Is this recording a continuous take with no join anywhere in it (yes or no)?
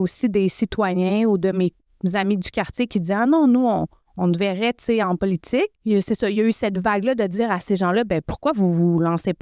no